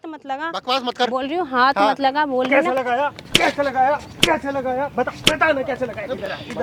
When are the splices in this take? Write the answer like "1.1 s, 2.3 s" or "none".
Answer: none